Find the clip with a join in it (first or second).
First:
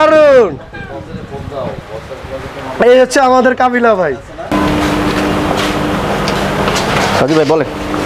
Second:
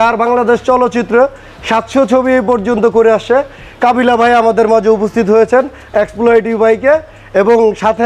first